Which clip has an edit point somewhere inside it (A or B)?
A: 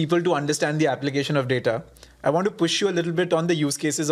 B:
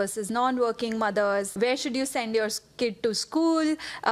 B